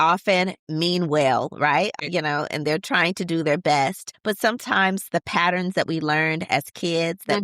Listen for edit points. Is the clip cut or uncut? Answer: cut